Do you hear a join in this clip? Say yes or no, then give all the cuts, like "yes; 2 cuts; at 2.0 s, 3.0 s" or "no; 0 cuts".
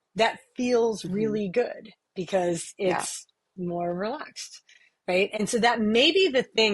yes; 1 cut; at 5.4 s